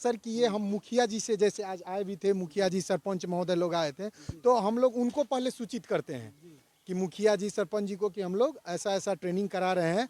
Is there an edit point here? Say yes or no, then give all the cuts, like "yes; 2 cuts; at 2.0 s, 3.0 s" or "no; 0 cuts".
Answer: no; 0 cuts